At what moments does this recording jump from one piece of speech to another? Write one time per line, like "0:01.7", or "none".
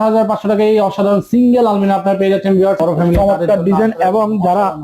0:02.8